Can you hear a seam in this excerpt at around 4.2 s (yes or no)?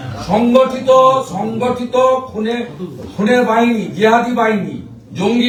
no